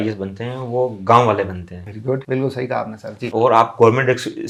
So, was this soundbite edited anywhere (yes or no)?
no